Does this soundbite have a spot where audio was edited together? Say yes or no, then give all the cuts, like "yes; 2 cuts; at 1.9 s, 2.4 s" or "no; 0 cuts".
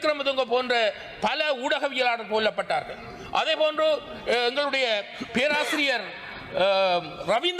no; 0 cuts